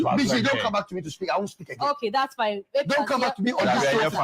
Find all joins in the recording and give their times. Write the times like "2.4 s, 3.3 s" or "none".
3.2 s